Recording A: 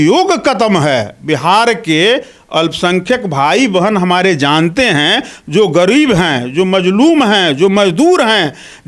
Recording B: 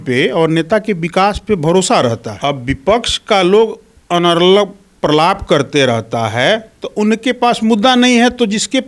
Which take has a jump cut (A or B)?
B